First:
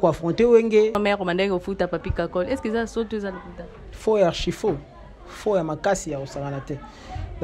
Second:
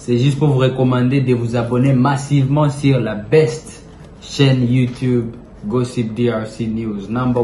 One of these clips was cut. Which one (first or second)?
first